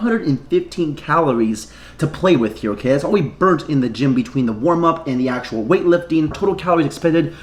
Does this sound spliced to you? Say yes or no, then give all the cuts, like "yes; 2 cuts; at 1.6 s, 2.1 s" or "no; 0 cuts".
no; 0 cuts